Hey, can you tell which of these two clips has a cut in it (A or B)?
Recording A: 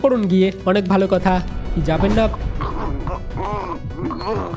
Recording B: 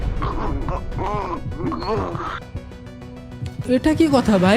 A